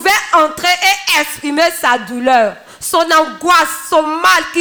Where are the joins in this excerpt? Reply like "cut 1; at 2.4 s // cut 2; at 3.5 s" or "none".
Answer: none